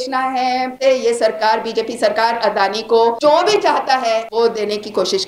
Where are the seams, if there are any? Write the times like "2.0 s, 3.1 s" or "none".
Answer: 0.8 s, 3.2 s, 4.3 s